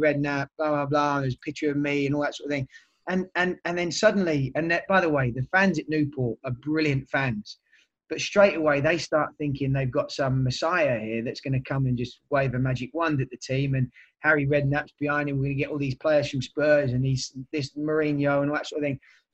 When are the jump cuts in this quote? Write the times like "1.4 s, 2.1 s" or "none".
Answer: none